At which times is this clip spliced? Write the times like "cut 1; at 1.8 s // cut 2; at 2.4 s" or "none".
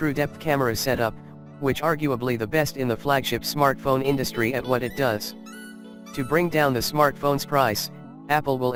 none